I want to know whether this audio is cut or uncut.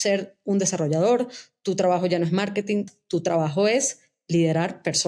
cut